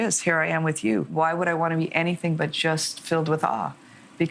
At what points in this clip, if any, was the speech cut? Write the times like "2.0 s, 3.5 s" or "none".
1.1 s